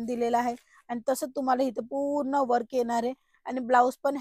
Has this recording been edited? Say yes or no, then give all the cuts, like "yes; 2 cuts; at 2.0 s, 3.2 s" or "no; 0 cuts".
no; 0 cuts